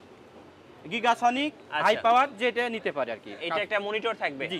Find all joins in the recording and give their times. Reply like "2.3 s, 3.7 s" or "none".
none